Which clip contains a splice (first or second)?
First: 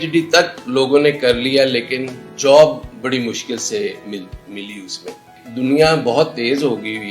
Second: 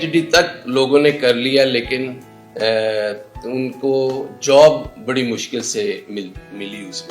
first